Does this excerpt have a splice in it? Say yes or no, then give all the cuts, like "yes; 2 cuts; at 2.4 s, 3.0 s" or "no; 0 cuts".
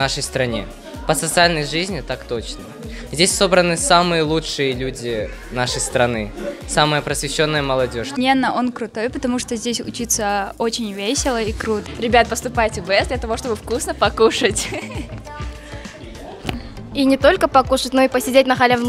yes; 2 cuts; at 8.2 s, 11.9 s